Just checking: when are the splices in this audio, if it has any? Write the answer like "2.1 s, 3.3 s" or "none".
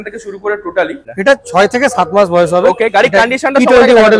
1.1 s